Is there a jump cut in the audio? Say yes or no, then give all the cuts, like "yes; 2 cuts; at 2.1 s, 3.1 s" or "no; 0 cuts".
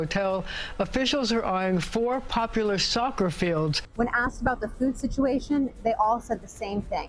yes; 1 cut; at 3.9 s